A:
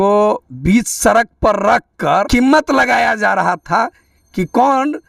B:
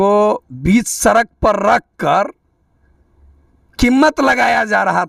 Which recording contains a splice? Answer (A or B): A